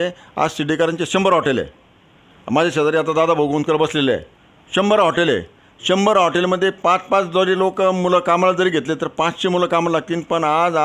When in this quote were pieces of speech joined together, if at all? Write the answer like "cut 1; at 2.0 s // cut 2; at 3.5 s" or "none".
none